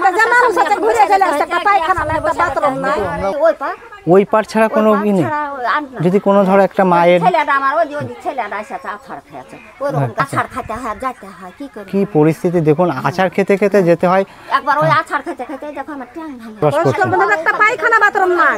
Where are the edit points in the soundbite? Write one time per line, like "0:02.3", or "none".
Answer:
0:03.3
0:10.2
0:16.6